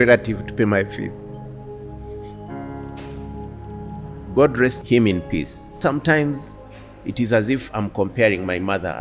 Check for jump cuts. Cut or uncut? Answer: cut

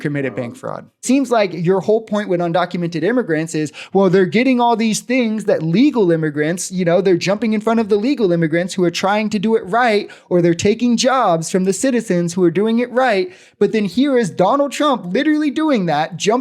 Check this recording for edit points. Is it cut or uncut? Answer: cut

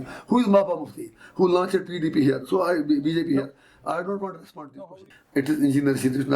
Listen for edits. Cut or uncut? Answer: cut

